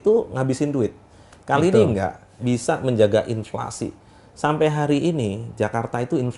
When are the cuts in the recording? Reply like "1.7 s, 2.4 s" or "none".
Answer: 2.2 s

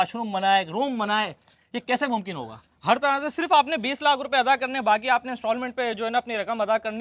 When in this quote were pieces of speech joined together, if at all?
none

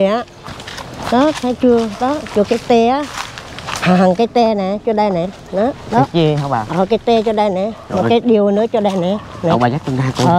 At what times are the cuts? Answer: none

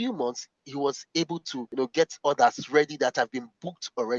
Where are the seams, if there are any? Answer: 1.6 s

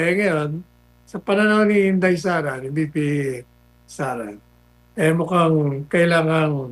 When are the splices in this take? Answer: none

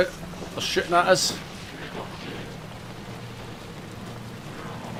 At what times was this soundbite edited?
none

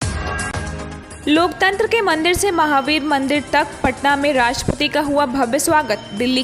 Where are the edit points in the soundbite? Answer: none

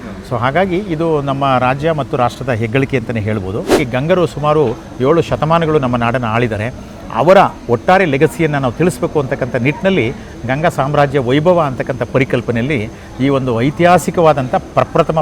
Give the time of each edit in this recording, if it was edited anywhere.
3.8 s

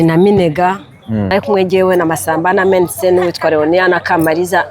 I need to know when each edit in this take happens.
1.3 s

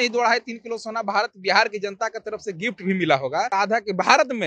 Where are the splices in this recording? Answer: 3.5 s

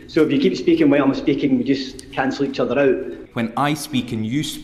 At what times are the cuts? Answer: 3.2 s

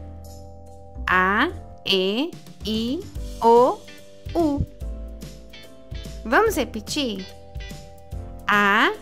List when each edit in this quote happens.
1.1 s

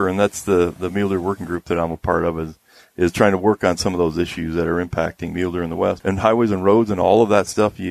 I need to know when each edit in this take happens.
6.0 s

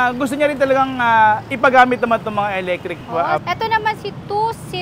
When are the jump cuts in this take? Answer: 3.4 s

